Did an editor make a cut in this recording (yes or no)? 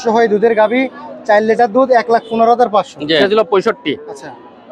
yes